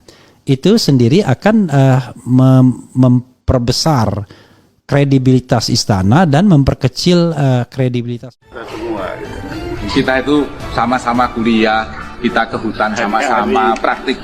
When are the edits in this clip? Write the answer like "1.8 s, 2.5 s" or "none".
8.1 s